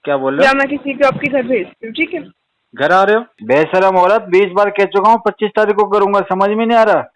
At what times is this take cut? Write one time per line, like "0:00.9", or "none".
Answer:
0:03.3